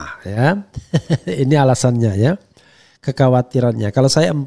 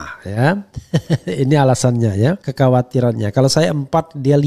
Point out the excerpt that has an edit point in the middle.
second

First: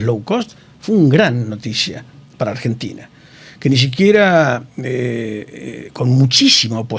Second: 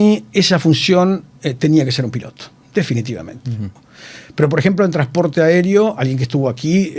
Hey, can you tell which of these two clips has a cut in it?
second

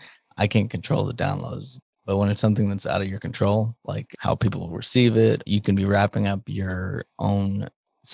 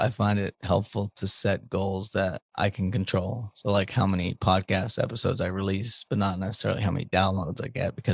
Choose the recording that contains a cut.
first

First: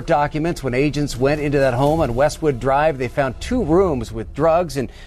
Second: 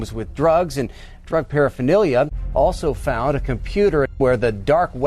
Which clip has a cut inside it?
second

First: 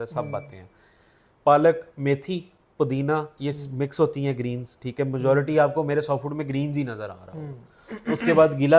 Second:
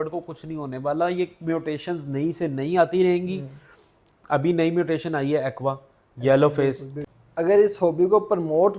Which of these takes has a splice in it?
second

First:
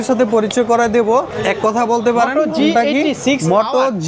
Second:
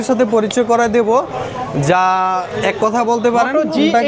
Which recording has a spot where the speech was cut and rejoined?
first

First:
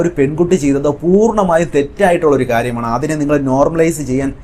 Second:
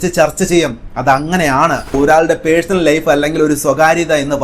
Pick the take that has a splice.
second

